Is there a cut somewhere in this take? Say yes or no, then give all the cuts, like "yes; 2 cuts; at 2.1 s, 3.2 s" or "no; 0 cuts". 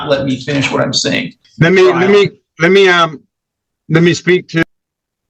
yes; 1 cut; at 1.4 s